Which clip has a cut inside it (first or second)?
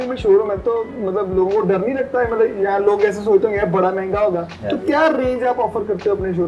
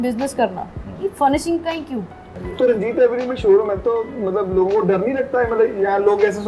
second